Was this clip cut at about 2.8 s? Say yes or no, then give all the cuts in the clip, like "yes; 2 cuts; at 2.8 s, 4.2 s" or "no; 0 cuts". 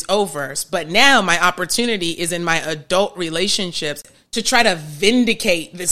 no; 1 cut; at 4.1 s